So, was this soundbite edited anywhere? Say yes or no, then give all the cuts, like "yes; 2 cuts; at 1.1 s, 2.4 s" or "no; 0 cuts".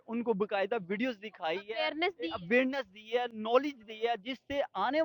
no; 0 cuts